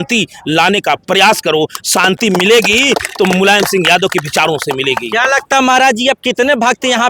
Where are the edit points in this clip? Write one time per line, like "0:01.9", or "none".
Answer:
none